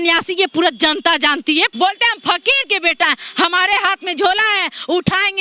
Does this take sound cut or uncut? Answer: cut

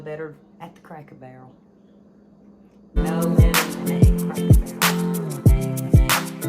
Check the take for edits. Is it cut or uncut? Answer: cut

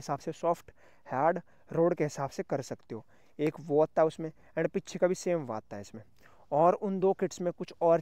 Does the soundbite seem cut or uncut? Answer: uncut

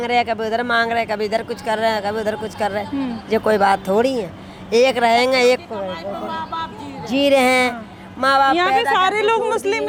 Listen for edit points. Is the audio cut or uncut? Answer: uncut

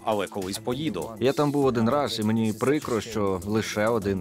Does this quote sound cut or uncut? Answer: uncut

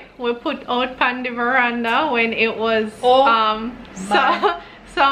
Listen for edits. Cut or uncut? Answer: uncut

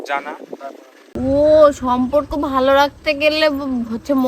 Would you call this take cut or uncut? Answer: cut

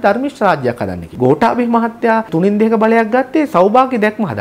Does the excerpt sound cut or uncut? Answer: cut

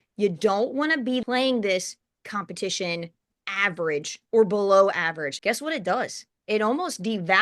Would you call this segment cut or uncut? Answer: cut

